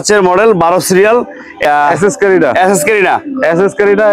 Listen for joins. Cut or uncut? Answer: cut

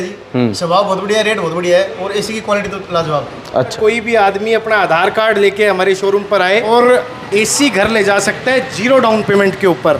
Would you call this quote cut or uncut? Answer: cut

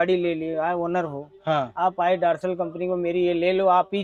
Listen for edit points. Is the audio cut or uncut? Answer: uncut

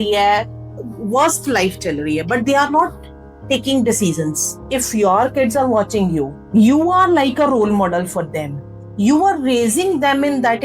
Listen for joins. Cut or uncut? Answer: cut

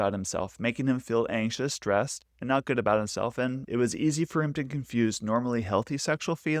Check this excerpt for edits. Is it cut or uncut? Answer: cut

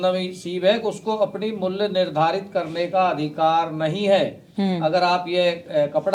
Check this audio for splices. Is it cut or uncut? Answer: uncut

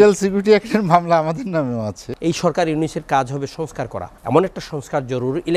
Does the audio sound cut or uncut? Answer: cut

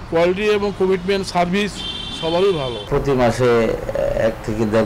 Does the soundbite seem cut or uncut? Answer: cut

